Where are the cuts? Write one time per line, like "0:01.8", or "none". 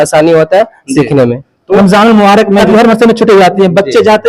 0:01.6
0:02.7